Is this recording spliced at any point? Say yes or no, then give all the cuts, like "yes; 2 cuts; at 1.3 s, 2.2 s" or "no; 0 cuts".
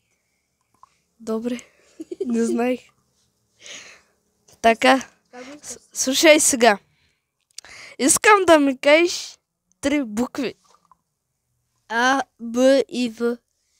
no; 0 cuts